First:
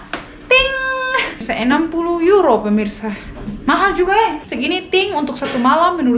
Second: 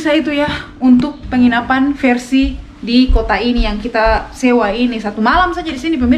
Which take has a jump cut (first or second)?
first